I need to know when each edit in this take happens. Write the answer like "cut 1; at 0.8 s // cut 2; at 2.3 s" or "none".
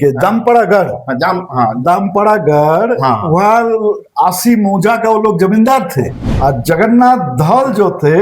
cut 1; at 6.2 s